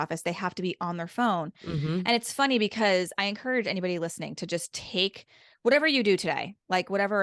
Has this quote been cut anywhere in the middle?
no; 0 cuts

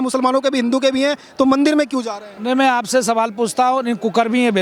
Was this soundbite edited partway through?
no; 0 cuts

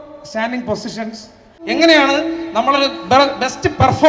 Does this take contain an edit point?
yes; 1 cut; at 1.6 s

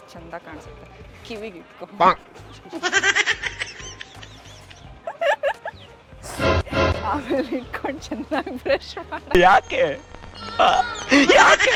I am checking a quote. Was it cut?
no; 0 cuts

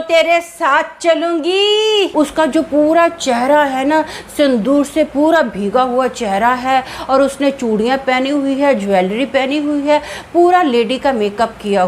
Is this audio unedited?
no; 1 cut; at 2.1 s

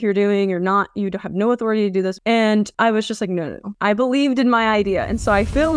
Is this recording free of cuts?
yes; 0 cuts

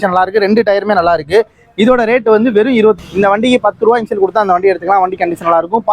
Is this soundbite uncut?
no; 1 cut; at 3.0 s

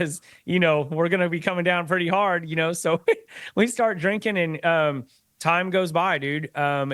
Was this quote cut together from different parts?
no; 0 cuts

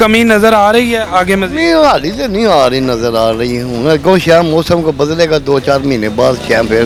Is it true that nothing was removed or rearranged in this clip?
yes; 0 cuts

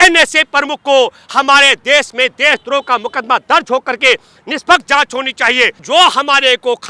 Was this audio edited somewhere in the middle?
yes; 1 cut; at 5.8 s

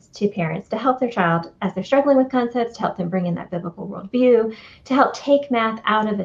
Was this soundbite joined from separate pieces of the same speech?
no; 0 cuts

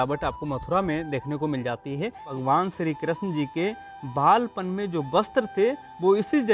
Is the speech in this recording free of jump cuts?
no; 1 cut; at 2.3 s

